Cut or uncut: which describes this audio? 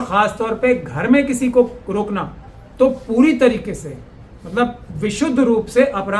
uncut